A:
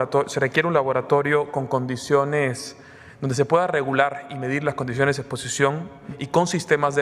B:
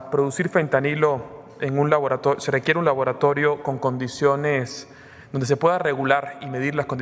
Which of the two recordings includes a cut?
A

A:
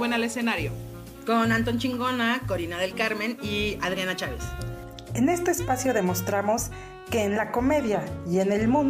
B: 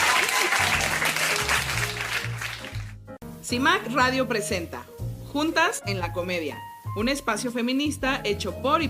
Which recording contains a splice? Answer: B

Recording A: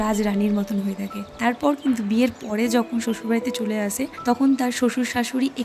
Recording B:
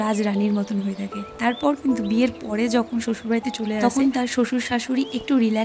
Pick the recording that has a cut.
B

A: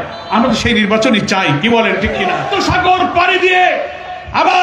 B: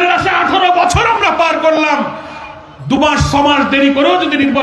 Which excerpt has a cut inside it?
A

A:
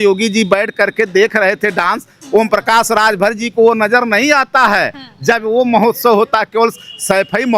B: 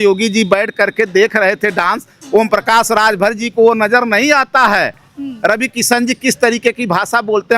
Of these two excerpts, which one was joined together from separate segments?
B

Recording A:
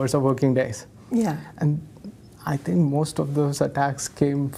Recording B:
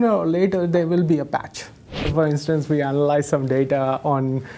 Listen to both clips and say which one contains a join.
B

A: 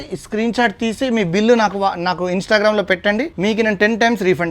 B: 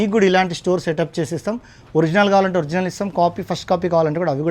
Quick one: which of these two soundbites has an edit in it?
A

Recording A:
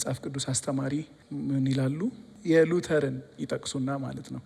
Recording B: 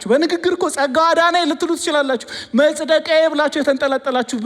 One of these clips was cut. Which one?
A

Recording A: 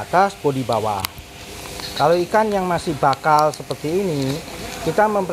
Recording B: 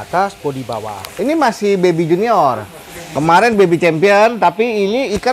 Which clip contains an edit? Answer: B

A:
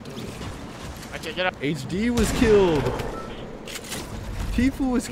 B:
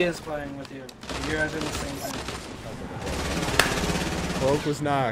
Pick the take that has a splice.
B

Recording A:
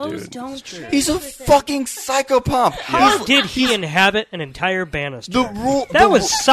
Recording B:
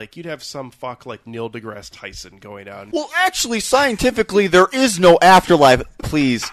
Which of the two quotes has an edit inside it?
B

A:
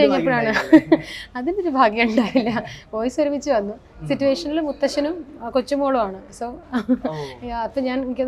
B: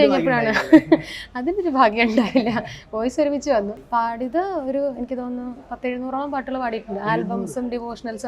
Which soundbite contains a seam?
B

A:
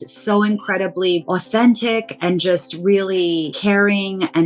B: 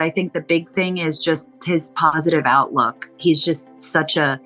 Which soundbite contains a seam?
A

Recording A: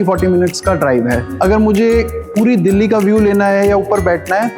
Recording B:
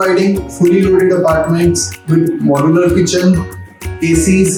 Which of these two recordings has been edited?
A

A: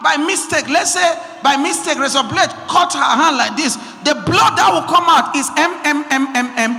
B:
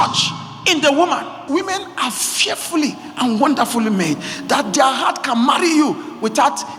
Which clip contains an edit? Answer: B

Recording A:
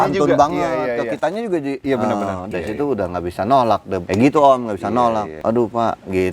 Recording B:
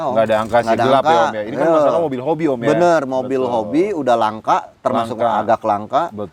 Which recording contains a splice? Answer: A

